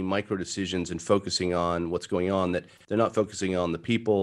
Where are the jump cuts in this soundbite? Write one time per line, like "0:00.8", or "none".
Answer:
none